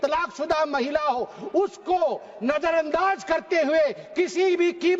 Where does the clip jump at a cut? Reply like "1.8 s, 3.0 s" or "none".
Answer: none